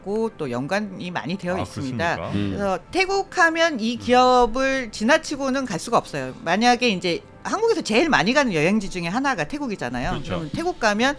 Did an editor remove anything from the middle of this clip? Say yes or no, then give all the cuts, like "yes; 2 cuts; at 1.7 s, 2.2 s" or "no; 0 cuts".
yes; 1 cut; at 2.5 s